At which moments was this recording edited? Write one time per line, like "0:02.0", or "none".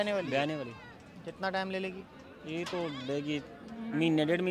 none

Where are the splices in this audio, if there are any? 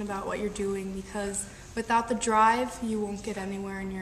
none

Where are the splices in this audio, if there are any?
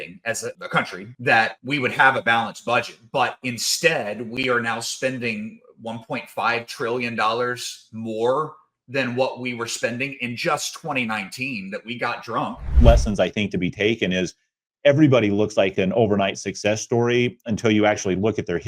0:12.6

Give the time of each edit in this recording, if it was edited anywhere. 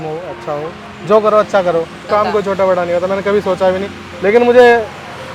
0:02.1

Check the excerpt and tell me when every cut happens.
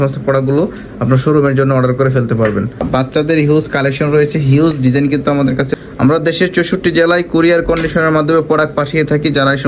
0:02.8
0:05.7

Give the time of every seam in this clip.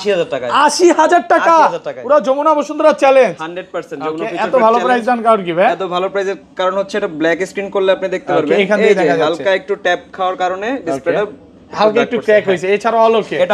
none

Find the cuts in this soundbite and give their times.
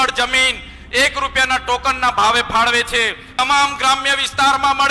0:03.2

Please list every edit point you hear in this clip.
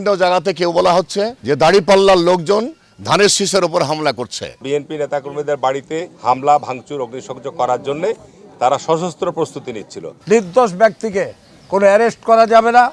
0:01.4
0:04.6
0:10.1

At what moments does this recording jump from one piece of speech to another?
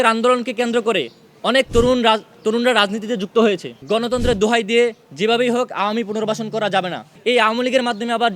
0:03.7
0:07.1

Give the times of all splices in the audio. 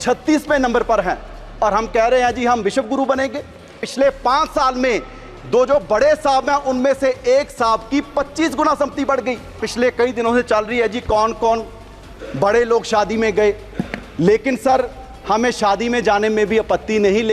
0:03.8
0:09.6

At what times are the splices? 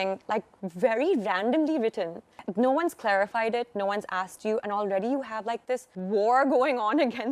0:02.4
0:05.9

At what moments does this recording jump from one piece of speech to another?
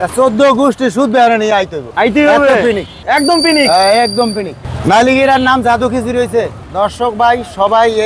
none

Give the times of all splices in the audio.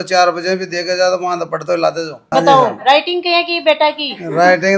0:02.2

